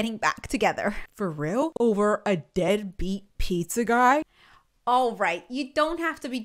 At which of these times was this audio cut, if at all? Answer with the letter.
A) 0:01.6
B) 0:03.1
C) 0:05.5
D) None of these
A